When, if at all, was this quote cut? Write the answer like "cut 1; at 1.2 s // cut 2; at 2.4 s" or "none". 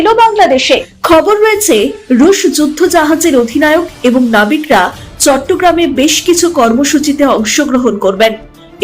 cut 1; at 0.9 s